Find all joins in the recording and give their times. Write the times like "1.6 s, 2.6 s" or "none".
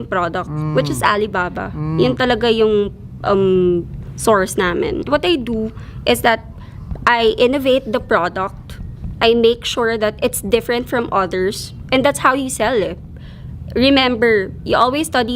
5.0 s